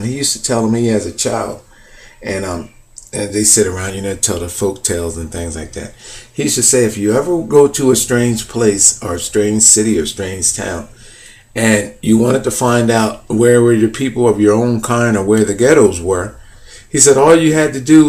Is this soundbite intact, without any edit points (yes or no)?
no